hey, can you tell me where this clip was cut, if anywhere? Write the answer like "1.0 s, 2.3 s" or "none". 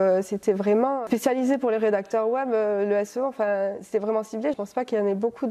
4.6 s